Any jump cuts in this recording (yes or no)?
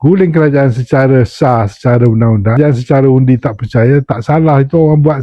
yes